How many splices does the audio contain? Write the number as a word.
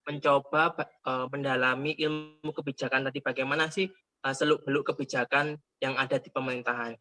zero